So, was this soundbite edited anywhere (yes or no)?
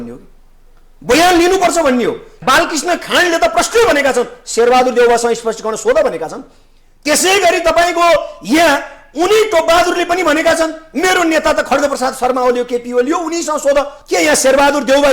yes